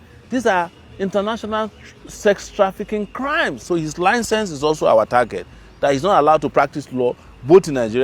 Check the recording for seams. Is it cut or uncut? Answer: cut